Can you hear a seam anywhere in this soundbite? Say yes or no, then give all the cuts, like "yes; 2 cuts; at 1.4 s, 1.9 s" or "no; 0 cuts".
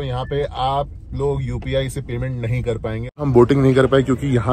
yes; 1 cut; at 3.2 s